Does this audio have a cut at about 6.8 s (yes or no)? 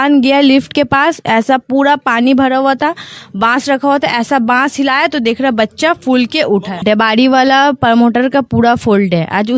yes